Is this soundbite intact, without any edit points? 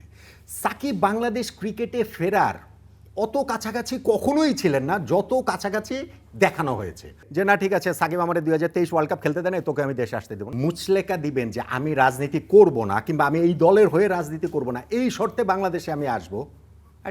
no; 2 cuts; at 7.2 s, 10.4 s

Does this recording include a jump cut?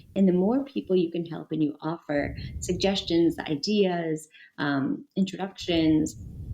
no; 0 cuts

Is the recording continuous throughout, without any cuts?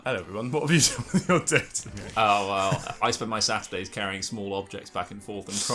yes; 0 cuts

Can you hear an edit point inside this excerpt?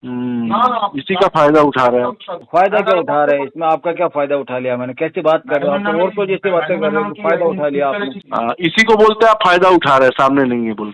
yes; 2 cuts; at 2.3 s, 8.2 s

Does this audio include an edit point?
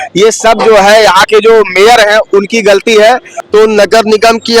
yes; 1 cut; at 3.3 s

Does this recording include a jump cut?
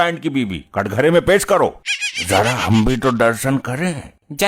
no; 0 cuts

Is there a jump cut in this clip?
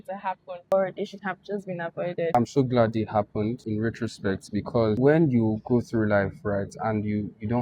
yes; 3 cuts; at 2.3 s, 3.6 s, 5.0 s

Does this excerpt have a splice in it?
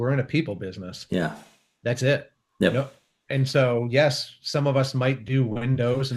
no; 0 cuts

